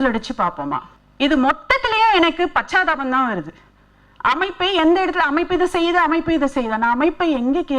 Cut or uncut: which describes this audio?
cut